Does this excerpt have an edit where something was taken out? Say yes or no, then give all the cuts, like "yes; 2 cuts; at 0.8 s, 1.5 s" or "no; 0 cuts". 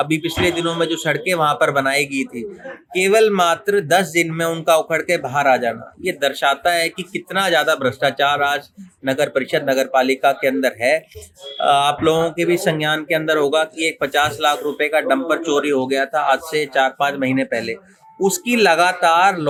no; 0 cuts